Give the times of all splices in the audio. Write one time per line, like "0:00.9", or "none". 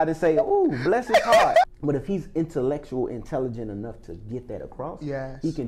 0:01.6